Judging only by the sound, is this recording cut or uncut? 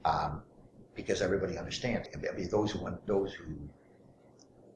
cut